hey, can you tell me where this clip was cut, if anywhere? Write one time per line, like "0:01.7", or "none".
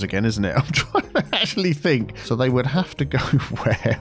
0:02.2